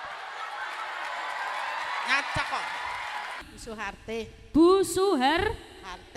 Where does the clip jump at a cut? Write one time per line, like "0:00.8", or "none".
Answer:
0:03.5